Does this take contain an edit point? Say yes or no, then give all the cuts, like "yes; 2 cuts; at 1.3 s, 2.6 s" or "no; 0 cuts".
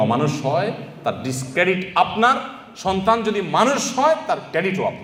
no; 0 cuts